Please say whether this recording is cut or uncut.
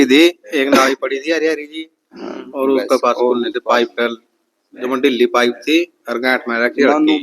uncut